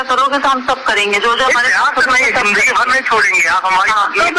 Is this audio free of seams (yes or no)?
yes